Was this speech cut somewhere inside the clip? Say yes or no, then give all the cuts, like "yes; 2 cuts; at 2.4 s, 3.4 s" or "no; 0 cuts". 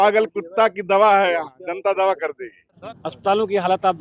yes; 1 cut; at 2.8 s